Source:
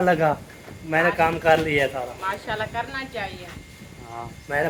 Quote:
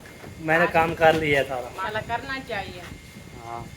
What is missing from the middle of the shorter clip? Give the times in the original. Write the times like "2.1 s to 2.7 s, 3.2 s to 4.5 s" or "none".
2.3 s to 2.5 s